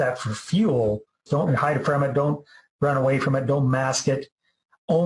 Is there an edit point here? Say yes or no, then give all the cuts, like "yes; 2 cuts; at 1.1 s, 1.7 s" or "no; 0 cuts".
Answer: yes; 1 cut; at 1.5 s